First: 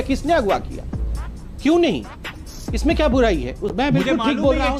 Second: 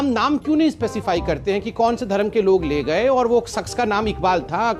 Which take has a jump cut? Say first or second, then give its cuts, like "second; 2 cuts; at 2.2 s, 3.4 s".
first; 1 cut; at 3.6 s